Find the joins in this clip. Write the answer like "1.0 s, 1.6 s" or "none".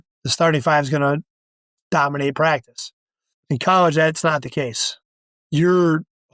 3.3 s